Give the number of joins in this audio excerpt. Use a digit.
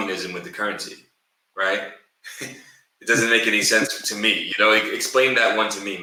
0